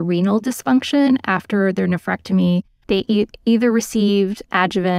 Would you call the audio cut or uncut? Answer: uncut